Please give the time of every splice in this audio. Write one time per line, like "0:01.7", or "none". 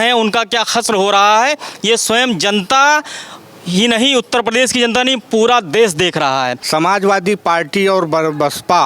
0:06.6